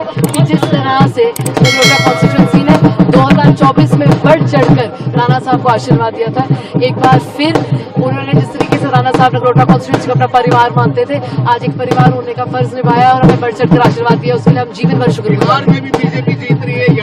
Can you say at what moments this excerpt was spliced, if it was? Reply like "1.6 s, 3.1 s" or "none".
none